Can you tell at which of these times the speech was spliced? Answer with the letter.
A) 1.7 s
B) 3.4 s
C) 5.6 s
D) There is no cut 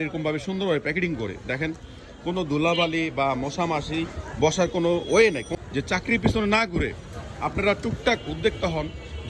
C